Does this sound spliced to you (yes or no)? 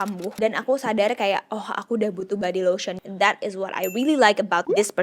yes